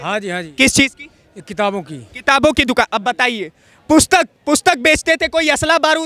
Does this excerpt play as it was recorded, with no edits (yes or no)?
yes